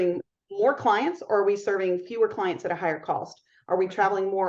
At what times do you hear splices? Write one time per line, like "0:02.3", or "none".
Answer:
none

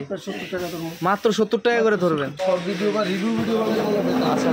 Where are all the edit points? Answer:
0:02.4

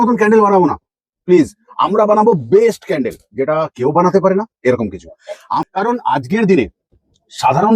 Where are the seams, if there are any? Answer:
0:05.5

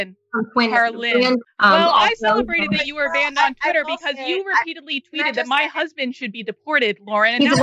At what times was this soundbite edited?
0:01.5

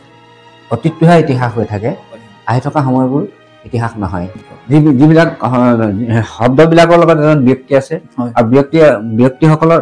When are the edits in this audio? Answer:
0:04.5

